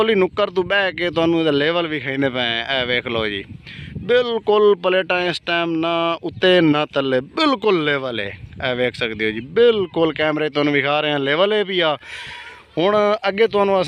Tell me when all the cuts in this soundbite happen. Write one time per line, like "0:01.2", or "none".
none